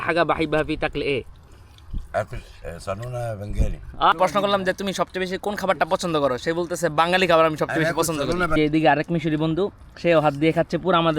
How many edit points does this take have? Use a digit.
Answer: 2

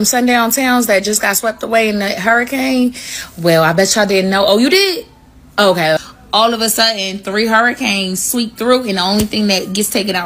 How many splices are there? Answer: 1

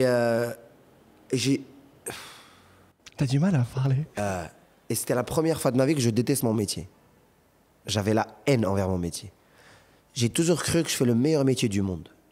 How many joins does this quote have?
0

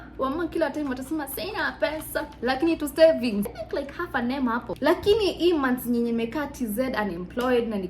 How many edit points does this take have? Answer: 2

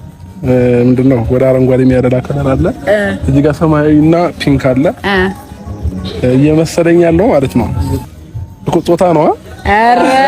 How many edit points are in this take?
1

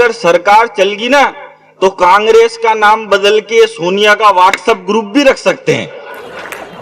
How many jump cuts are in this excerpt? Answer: 0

